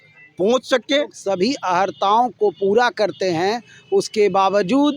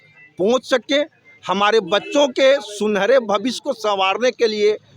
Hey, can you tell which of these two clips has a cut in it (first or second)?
first